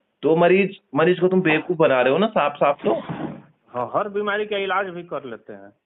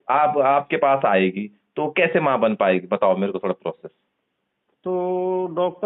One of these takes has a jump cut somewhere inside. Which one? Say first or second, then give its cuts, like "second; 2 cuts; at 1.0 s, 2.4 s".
first; 1 cut; at 3.6 s